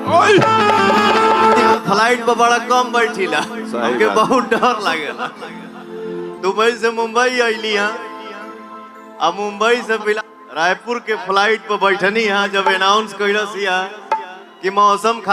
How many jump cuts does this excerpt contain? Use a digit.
3